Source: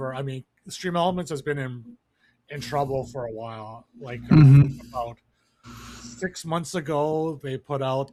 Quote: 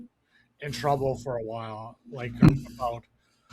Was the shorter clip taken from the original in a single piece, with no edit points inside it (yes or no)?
no